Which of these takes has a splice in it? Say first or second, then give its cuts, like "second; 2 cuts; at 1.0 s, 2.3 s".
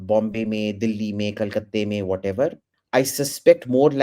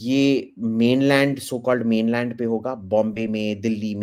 first; 1 cut; at 2.7 s